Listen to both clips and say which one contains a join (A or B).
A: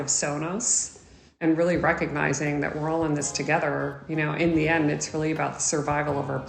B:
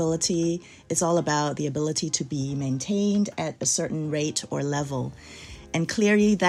A